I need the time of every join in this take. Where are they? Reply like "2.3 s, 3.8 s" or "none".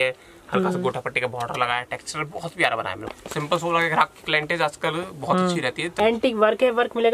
3.1 s, 5.9 s